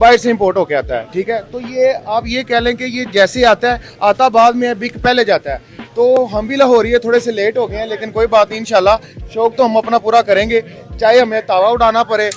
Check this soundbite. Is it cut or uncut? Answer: uncut